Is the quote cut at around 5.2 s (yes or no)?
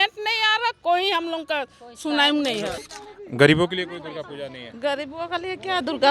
no